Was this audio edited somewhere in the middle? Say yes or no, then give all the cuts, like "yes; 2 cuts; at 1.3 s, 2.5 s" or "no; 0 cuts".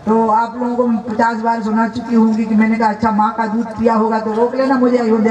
no; 0 cuts